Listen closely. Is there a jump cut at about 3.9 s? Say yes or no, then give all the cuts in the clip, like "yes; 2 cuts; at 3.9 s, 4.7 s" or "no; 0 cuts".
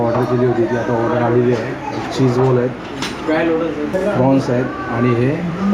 yes; 1 cut; at 3.9 s